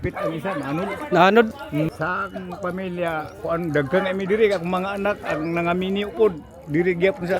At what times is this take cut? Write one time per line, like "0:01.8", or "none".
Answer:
0:01.9

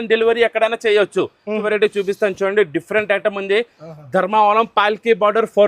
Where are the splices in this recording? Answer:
0:01.6

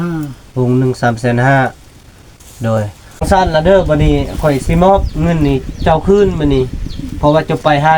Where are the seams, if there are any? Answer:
0:03.3

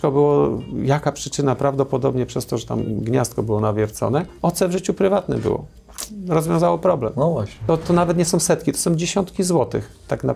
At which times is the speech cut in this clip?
0:04.3
0:07.6

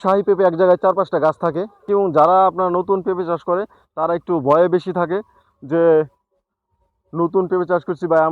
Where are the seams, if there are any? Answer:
0:01.8

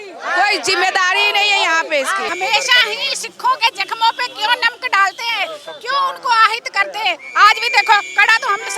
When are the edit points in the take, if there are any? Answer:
0:02.3

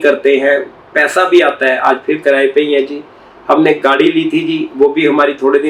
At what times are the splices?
none

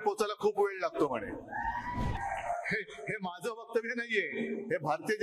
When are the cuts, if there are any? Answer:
0:02.1

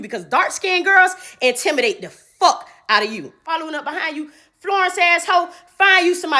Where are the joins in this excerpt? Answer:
0:03.4

